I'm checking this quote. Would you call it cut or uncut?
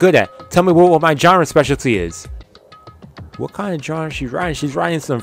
uncut